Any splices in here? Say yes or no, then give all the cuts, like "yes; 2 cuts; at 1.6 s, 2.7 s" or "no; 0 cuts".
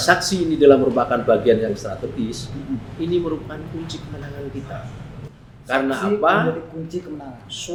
no; 0 cuts